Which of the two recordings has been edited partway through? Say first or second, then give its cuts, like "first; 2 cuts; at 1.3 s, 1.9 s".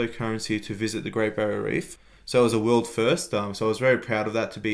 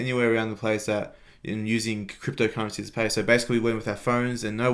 first; 1 cut; at 1.9 s